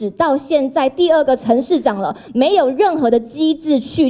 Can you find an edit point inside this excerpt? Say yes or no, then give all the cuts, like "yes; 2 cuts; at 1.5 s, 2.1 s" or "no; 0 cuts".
no; 0 cuts